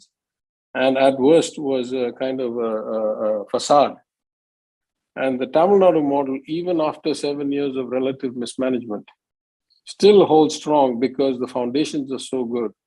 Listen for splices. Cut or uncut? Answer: uncut